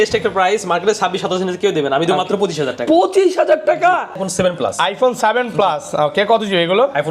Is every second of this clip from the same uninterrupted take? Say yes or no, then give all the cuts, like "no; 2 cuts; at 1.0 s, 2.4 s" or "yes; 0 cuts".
no; 1 cut; at 4.2 s